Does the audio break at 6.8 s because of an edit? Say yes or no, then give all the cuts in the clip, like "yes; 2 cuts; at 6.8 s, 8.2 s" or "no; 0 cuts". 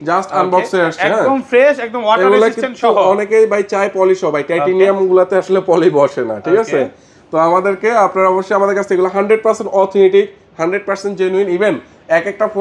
no; 0 cuts